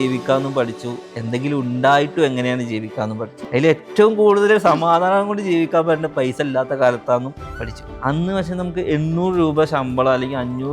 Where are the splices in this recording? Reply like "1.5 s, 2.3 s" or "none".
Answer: 3.3 s, 7.8 s

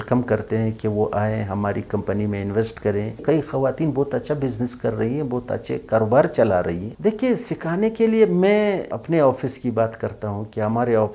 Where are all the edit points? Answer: 3.2 s, 6.8 s, 8.9 s

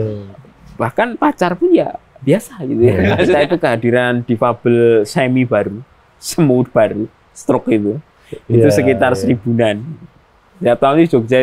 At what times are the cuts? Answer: 3.4 s

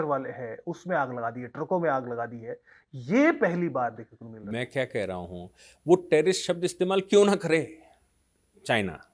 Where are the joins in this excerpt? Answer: none

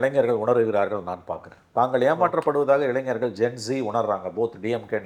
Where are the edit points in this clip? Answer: none

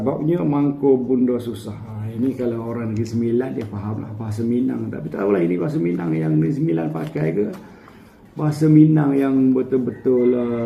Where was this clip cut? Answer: none

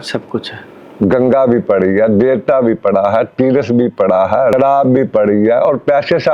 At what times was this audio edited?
4.5 s

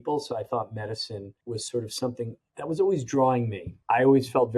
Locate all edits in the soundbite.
1.3 s, 2.4 s, 3.7 s

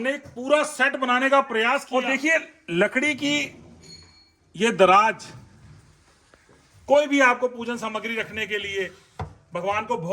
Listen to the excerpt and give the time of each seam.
1.9 s

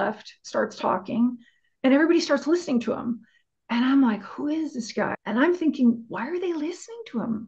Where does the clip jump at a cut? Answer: 5.2 s

